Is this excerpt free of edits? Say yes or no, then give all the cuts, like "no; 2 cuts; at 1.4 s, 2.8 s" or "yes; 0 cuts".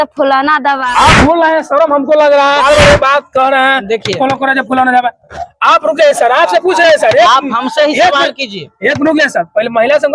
no; 2 cuts; at 0.8 s, 2.6 s